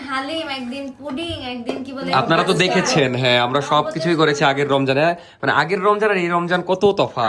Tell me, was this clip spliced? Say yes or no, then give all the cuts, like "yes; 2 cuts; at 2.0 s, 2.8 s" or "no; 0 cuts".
no; 0 cuts